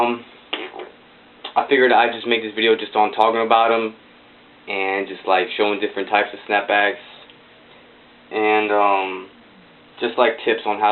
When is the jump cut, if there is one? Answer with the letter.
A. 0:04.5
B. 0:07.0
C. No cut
B